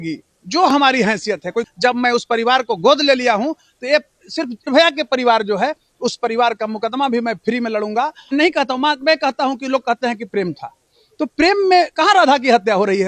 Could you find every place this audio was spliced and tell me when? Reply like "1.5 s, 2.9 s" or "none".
1.7 s, 4.7 s, 8.2 s